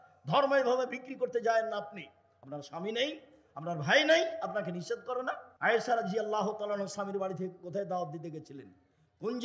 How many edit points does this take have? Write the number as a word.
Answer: one